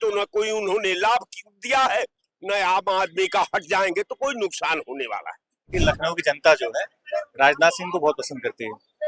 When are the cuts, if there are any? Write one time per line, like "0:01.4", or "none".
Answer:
0:05.7